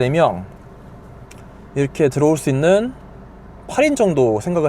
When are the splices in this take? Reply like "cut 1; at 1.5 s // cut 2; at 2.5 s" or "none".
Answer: none